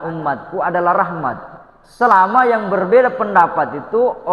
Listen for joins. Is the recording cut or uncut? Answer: uncut